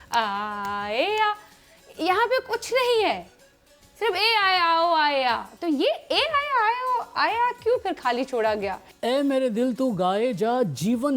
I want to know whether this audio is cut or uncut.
cut